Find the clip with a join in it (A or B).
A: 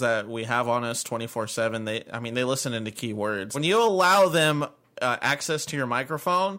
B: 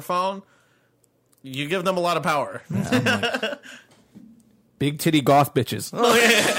A